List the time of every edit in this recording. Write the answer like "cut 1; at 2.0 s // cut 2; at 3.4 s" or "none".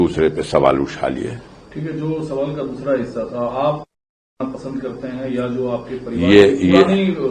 none